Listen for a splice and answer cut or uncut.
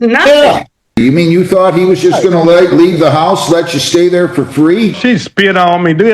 cut